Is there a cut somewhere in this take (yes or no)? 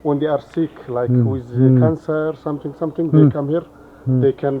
no